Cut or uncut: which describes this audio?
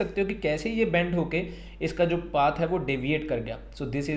uncut